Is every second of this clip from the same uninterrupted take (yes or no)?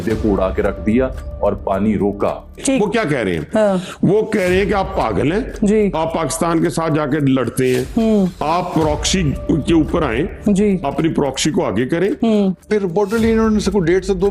no